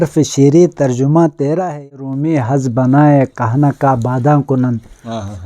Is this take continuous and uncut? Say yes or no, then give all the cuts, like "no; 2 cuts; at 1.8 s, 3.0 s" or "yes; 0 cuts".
no; 1 cut; at 2.1 s